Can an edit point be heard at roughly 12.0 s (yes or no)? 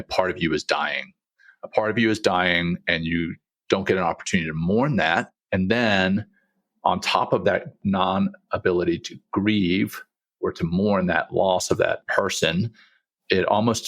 yes